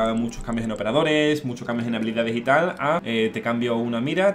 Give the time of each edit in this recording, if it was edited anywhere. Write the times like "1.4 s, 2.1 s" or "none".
3.0 s